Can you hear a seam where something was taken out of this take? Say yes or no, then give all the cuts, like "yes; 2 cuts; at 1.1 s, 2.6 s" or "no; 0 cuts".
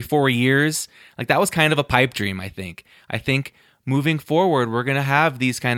no; 0 cuts